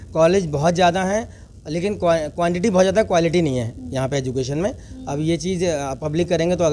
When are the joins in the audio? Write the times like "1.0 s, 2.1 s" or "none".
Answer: none